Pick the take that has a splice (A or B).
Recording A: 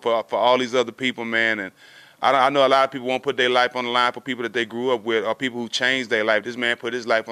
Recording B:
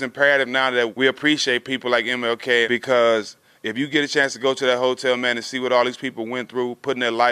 B